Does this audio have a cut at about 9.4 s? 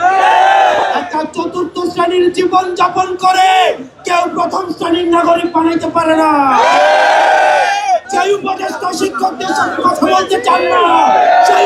no; 1 cut; at 8.1 s

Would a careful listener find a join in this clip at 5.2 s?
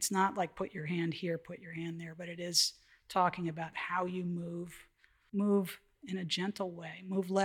yes; 1 cut; at 5.2 s

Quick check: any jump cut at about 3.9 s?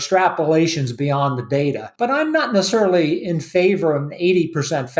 no; 1 cut; at 1.9 s

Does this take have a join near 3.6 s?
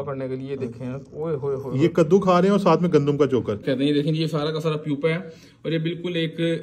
yes; 1 cut; at 3.6 s

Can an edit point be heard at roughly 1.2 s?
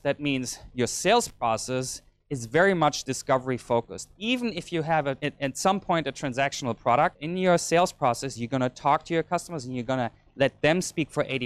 no; 3 cuts; at 3.1 s, 5.2 s, 7.2 s

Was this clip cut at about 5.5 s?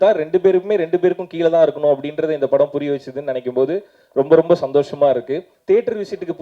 yes; 1 cut; at 5.5 s

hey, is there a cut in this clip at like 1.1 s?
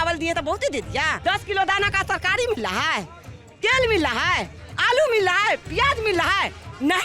yes; 1 cut; at 1.1 s

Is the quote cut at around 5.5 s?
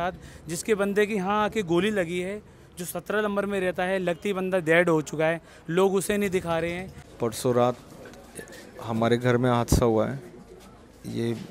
no; 1 cut; at 7.0 s

